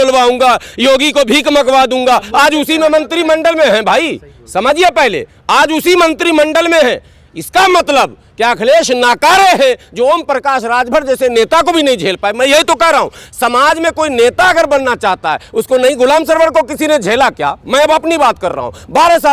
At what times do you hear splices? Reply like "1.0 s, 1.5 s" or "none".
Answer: none

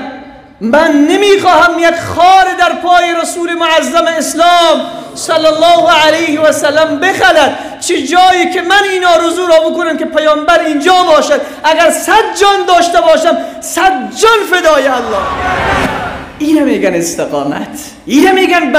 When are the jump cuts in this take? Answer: 15.5 s

